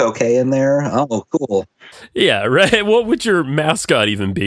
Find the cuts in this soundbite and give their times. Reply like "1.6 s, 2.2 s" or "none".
2.0 s